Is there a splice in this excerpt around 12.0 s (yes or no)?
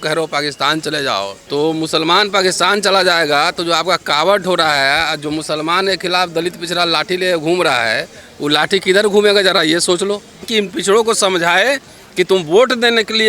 no